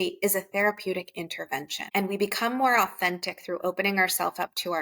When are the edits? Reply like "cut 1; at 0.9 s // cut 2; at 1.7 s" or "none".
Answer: cut 1; at 1.8 s